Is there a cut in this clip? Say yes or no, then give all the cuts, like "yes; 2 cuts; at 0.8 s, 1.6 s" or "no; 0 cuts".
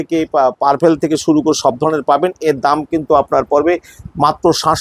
no; 0 cuts